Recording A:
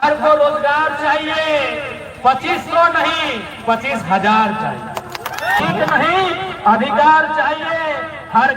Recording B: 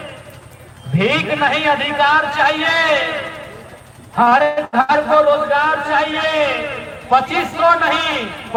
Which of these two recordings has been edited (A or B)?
A